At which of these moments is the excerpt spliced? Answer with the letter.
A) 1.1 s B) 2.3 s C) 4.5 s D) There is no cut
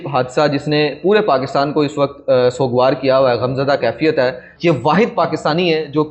C